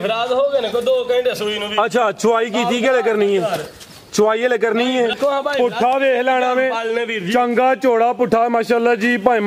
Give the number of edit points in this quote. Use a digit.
1